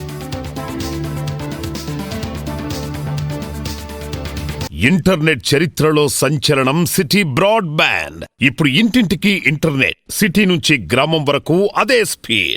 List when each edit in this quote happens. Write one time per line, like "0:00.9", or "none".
0:04.7